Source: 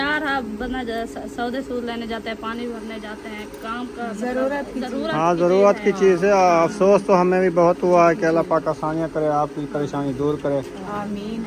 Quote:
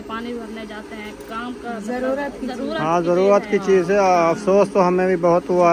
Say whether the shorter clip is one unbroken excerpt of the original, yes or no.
yes